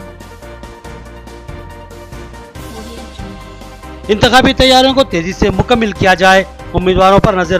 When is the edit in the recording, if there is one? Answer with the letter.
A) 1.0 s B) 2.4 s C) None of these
A